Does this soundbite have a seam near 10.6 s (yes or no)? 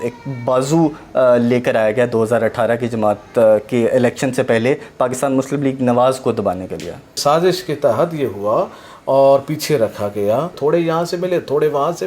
yes